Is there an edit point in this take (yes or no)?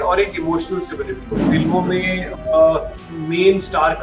yes